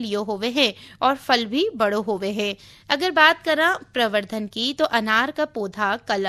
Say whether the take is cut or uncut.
uncut